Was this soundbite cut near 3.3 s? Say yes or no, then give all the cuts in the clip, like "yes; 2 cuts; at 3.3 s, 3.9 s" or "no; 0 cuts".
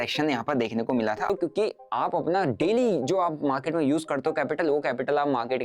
no; 1 cut; at 1.3 s